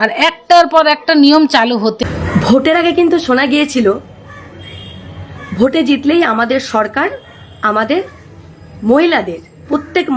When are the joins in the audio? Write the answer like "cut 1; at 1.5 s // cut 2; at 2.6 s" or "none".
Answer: cut 1; at 2.0 s